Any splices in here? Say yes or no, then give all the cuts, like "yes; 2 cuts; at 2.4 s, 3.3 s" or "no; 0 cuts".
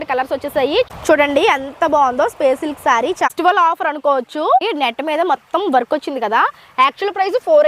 yes; 3 cuts; at 1.0 s, 3.3 s, 4.6 s